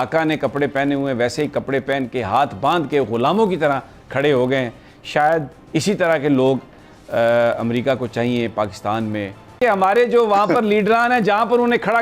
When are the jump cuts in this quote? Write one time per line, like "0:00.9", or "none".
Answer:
0:09.6